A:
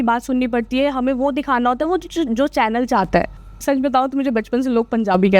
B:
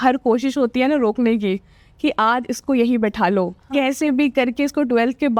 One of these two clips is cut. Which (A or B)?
A